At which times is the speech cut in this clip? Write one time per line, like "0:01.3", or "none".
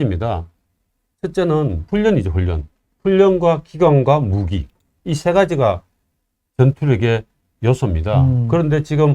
0:01.8